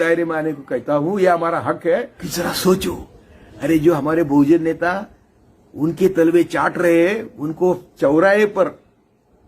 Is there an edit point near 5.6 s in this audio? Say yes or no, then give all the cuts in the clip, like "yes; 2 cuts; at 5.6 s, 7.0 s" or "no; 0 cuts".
no; 1 cut; at 2.2 s